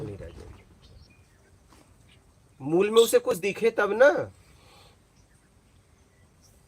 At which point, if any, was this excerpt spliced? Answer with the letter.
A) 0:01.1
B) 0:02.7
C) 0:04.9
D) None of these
A